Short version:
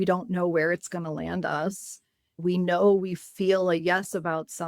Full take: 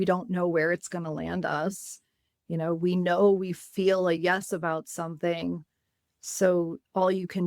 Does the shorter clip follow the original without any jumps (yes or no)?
no